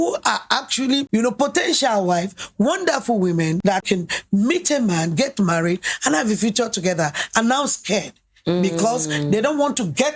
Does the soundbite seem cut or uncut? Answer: uncut